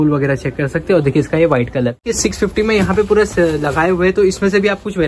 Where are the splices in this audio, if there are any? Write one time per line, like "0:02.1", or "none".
0:02.1